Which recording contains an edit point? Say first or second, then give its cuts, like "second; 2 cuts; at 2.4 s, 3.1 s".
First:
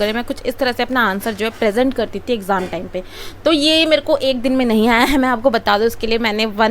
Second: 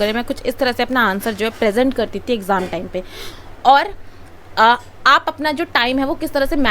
second; 1 cut; at 3.2 s